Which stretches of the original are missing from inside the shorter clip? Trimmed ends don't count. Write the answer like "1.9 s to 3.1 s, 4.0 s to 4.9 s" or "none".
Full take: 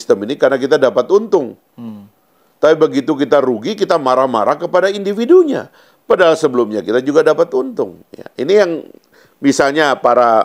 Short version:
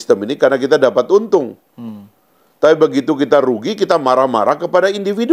none

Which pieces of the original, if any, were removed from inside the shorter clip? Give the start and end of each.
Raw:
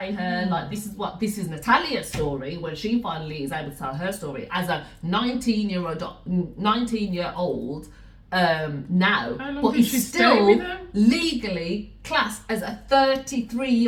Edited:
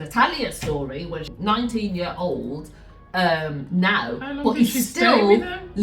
2.8 s to 6.5 s

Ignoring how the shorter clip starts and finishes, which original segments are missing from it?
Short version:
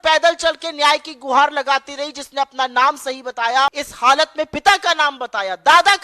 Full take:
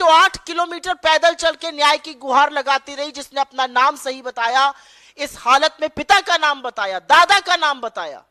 4.8 s to 5.3 s

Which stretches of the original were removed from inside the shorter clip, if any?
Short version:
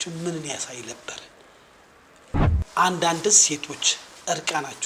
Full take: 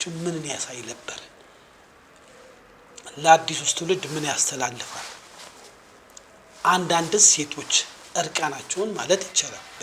2.5 s to 6.4 s

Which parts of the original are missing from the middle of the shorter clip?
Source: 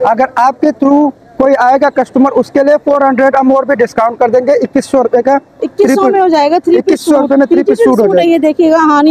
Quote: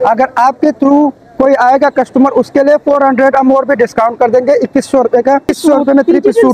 5.5 s to 6.9 s

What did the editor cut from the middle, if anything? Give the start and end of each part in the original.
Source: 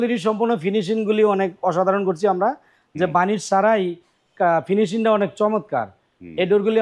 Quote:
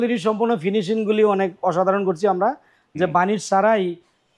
none

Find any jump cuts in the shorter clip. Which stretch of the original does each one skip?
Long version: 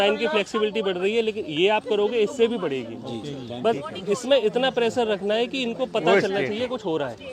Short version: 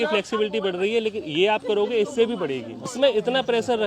3.1 s to 4.2 s

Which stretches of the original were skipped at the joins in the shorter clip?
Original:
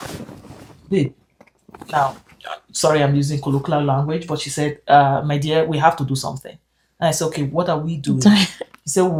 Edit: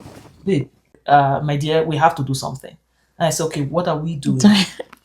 1.4 s to 4.8 s

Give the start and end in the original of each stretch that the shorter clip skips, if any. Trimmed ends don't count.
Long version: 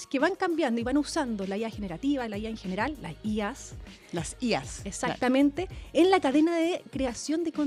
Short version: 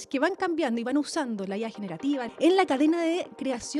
2.3 s to 5.8 s

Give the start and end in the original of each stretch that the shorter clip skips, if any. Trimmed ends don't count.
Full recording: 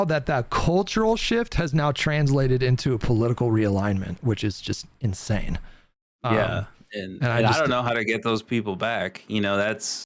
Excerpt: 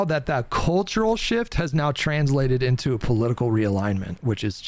none

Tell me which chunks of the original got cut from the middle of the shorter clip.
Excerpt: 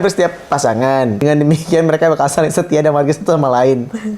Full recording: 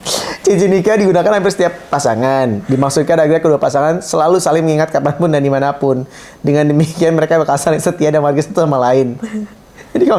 2.6 s to 6.5 s

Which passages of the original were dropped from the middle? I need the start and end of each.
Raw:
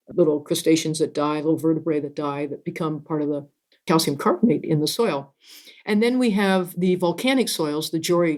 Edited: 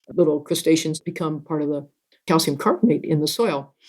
0.9 s to 2.5 s

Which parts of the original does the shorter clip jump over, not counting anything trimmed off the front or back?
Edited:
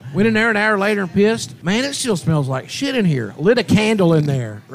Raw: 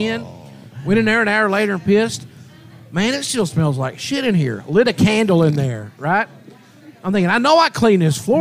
2.2 s to 2.8 s

